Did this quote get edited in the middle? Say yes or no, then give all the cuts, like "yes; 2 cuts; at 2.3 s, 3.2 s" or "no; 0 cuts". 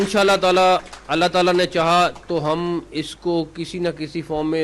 no; 0 cuts